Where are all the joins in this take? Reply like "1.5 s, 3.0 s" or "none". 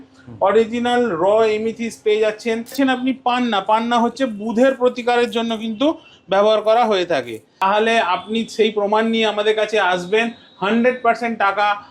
2.7 s, 7.6 s